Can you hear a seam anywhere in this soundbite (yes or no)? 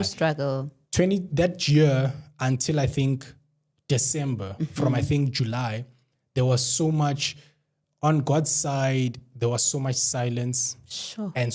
no